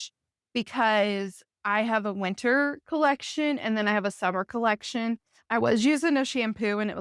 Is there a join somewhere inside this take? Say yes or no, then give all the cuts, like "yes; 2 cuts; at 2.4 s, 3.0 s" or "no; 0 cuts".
yes; 1 cut; at 5.3 s